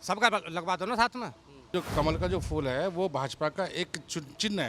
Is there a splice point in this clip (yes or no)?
yes